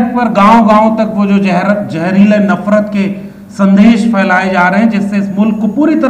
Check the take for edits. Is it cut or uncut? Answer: uncut